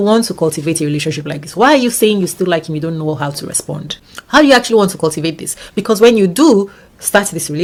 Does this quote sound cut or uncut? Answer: uncut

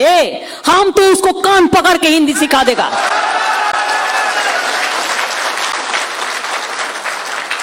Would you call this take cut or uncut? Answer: uncut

